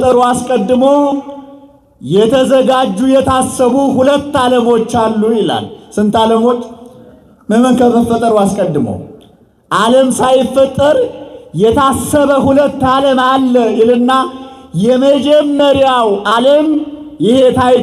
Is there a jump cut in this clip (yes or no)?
no